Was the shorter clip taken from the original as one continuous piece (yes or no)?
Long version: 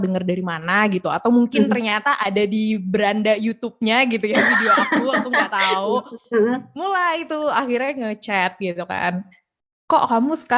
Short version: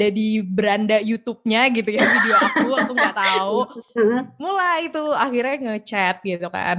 yes